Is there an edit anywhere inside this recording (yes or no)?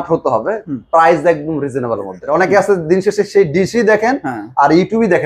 yes